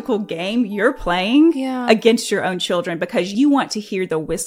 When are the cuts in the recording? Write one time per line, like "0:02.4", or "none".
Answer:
0:03.3